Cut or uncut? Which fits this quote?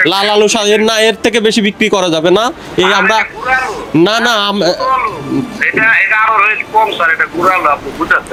uncut